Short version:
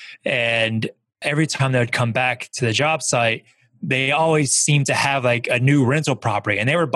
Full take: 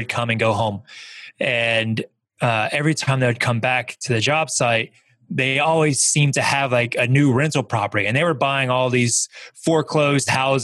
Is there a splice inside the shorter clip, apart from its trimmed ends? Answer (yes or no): yes